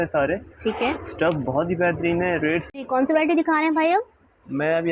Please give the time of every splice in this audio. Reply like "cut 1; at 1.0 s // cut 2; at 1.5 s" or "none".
cut 1; at 2.7 s

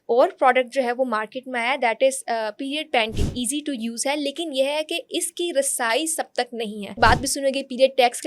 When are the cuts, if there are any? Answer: cut 1; at 3.4 s // cut 2; at 7.0 s

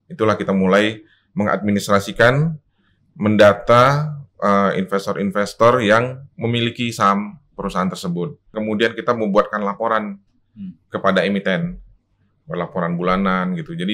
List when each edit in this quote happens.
cut 1; at 8.5 s

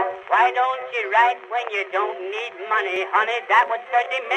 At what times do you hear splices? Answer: cut 1; at 2.9 s

